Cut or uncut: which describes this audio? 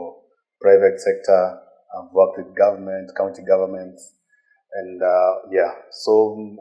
uncut